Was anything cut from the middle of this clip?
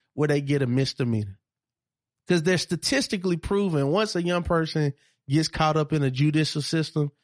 no; 0 cuts

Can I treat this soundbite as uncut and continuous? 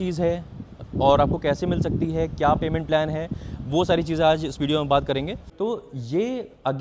no; 1 cut; at 5.4 s

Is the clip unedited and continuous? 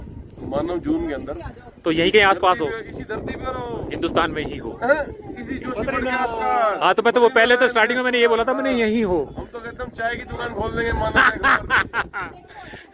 yes; 0 cuts

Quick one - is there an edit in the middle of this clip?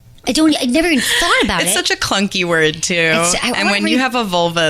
no; 0 cuts

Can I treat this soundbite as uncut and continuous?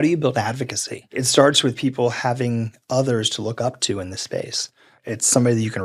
no; 1 cut; at 1.1 s

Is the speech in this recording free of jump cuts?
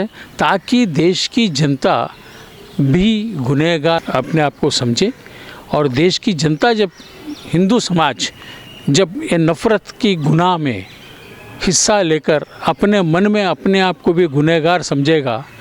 no; 1 cut; at 4.0 s

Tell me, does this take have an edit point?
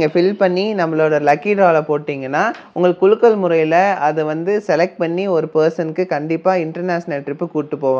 no; 0 cuts

